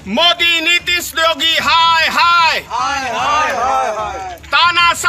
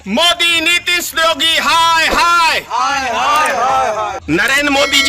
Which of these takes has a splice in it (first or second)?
second